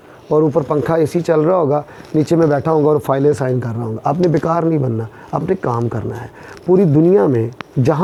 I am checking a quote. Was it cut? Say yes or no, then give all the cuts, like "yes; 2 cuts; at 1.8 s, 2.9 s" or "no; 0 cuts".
no; 0 cuts